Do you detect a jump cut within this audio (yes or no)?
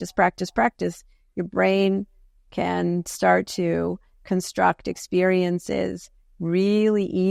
no